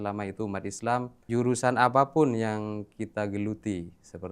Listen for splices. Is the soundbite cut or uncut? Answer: cut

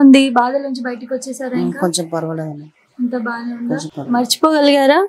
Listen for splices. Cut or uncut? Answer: uncut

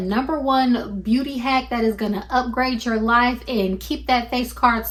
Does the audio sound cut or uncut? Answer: uncut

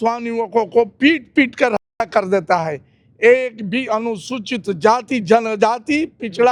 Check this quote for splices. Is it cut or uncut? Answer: uncut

